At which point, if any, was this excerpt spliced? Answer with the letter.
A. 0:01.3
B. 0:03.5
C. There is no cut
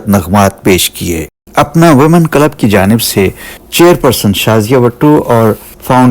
A